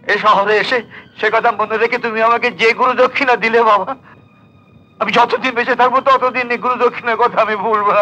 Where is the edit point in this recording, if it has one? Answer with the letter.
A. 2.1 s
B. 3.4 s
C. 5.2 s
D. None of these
D